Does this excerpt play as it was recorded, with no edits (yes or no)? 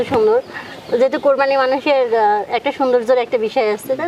yes